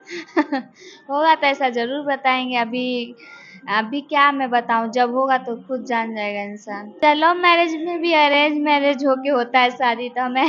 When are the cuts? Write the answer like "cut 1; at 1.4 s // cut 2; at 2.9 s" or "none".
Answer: cut 1; at 7.0 s